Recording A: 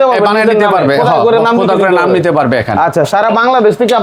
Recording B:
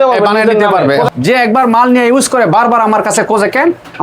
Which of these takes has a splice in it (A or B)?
B